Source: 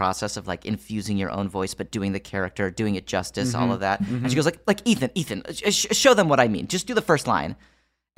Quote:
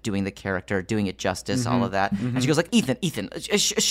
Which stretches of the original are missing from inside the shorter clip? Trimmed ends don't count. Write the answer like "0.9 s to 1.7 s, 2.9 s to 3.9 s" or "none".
4.6 s to 4.8 s